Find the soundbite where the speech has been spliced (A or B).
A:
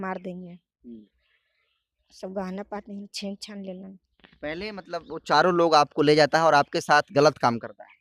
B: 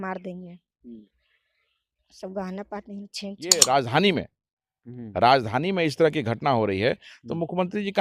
B